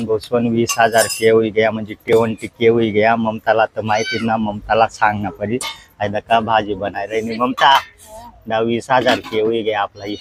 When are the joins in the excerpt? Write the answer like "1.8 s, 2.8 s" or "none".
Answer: none